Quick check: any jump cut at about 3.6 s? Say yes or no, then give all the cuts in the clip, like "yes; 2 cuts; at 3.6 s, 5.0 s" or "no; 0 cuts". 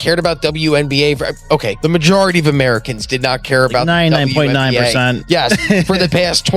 no; 0 cuts